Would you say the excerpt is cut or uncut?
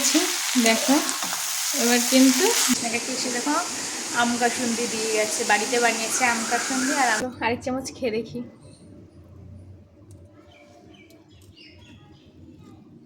cut